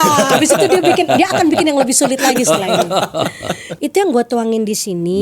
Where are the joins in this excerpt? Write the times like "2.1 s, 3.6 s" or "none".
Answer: 3.7 s

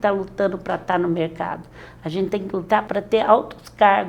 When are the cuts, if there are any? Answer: 2.9 s

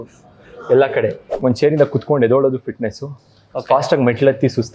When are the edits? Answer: 1.3 s

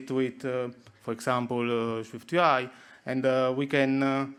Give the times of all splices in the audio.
none

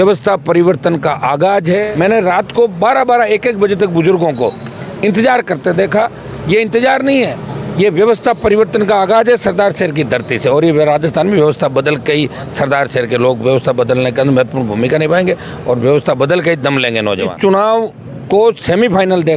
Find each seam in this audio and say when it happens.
1.9 s, 17.3 s

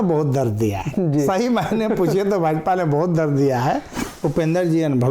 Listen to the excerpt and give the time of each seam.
4.1 s

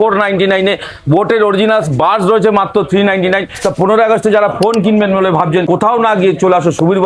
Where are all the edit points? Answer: 3.5 s

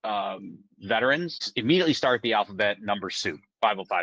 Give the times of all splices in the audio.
1.5 s

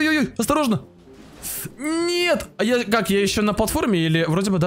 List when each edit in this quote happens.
none

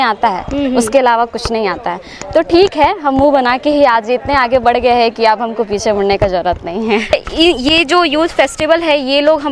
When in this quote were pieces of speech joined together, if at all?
7.1 s

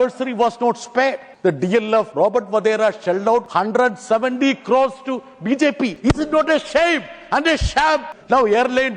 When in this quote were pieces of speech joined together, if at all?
1.3 s, 2.1 s, 3.5 s, 5.9 s, 8.1 s

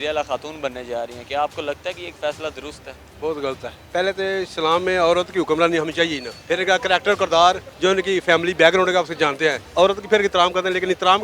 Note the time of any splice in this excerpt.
3.7 s, 6.3 s, 7.7 s, 9.6 s

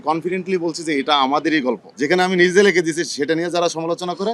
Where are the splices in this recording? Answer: 1.9 s

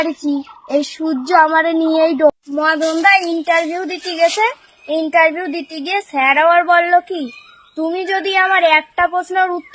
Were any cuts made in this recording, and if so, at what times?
2.4 s

